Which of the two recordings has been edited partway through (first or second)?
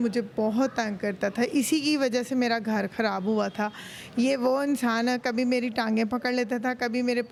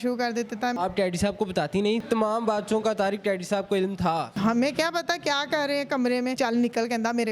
second